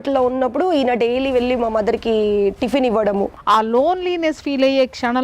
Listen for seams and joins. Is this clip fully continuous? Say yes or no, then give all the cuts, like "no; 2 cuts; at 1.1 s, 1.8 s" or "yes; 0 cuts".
no; 1 cut; at 3.4 s